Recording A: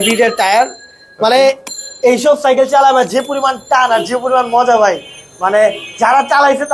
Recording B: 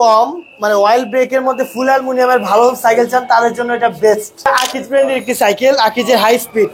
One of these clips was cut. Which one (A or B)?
B